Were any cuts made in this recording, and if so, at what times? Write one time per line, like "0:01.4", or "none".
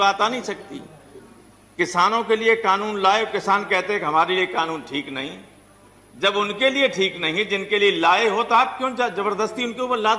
0:01.1